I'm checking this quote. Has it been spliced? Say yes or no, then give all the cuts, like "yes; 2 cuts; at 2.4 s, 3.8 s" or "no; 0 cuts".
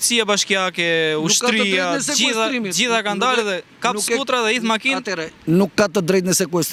no; 0 cuts